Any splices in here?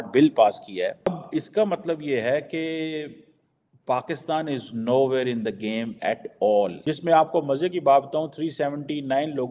no; 0 cuts

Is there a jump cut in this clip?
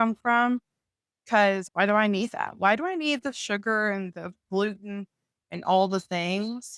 no; 0 cuts

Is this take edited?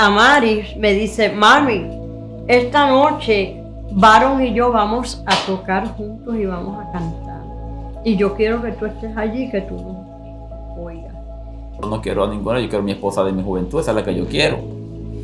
yes; 1 cut; at 11.9 s

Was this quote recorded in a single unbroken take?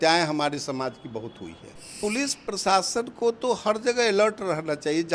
no; 1 cut; at 1.9 s

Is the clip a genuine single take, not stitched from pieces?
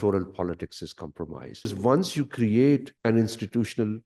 no; 2 cuts; at 1.7 s, 2.9 s

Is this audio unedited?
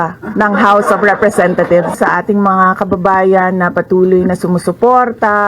no; 1 cut; at 1.9 s

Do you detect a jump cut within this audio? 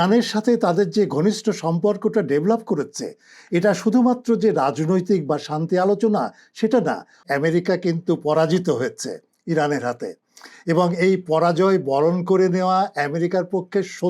yes; 1 cut; at 7.2 s

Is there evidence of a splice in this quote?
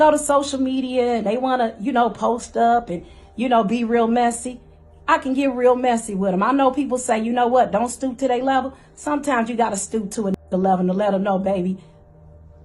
no; 0 cuts

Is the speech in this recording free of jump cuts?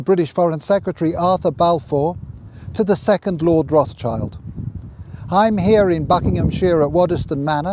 yes; 0 cuts

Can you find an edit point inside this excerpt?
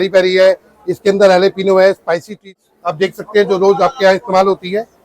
yes; 1 cut; at 2.6 s

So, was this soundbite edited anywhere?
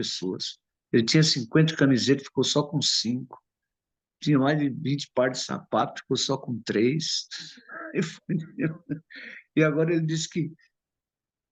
no; 0 cuts

